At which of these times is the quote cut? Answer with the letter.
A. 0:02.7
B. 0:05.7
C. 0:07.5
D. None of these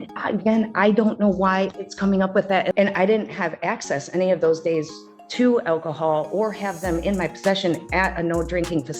A